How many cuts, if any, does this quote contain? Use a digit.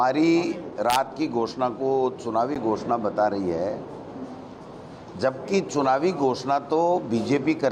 0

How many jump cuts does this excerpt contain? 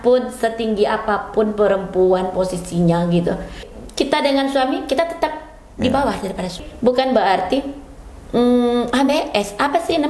2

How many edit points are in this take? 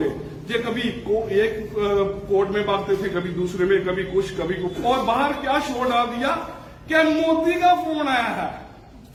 0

